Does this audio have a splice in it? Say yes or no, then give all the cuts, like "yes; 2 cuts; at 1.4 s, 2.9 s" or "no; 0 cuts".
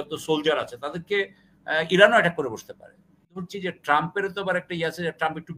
yes; 1 cut; at 3.5 s